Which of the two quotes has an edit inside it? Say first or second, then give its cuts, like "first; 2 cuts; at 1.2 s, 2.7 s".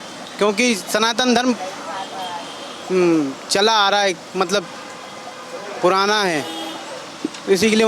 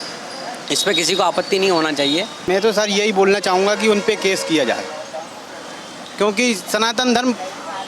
second; 1 cut; at 2.5 s